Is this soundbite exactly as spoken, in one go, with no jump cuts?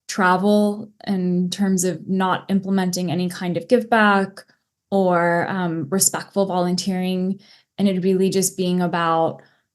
yes; 0 cuts

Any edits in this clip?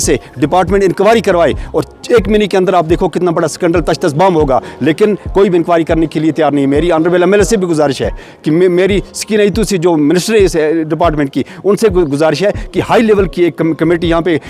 no; 0 cuts

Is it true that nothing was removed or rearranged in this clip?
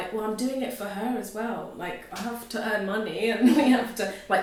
yes; 0 cuts

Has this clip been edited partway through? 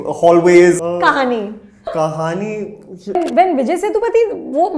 yes; 3 cuts; at 0.8 s, 1.9 s, 3.2 s

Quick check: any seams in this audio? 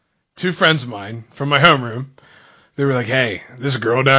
no; 0 cuts

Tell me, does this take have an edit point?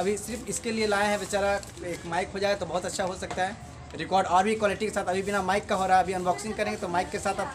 no; 0 cuts

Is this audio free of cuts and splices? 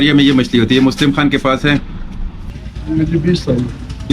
no; 1 cut; at 2.3 s

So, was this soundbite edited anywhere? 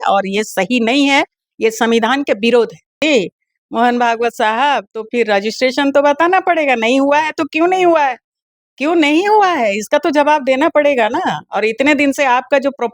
yes; 1 cut; at 3.0 s

